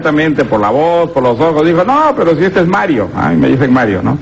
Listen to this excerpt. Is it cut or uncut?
cut